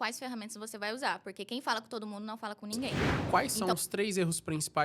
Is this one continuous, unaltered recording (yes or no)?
no